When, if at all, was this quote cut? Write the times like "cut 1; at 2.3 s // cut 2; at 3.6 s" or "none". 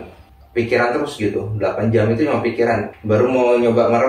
cut 1; at 2.9 s